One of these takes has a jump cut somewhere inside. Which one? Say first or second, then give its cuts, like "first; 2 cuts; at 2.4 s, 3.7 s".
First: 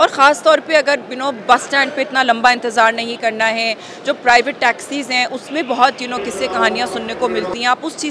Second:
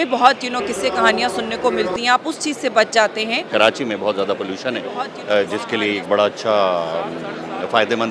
second; 1 cut; at 3.5 s